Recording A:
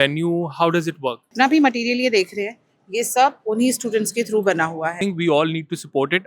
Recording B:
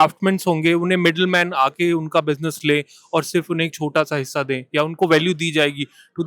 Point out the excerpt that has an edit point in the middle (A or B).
A